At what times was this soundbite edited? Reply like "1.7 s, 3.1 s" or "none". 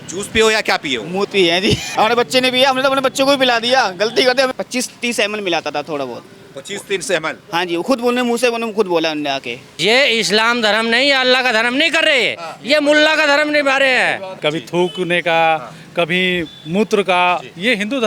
1.9 s, 4.5 s, 9.6 s, 14.4 s